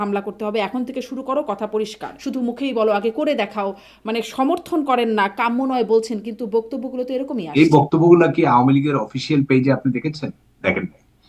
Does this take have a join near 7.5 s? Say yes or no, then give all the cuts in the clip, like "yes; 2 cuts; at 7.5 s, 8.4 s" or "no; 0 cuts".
yes; 2 cuts; at 2.1 s, 7.5 s